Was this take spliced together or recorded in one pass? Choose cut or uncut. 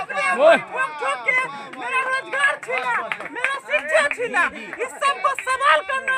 uncut